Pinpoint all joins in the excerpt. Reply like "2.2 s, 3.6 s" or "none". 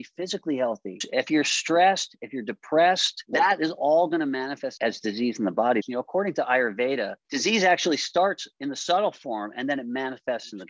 1.0 s, 3.1 s, 4.7 s, 5.8 s, 7.2 s